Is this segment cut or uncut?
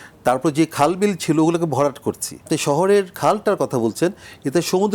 cut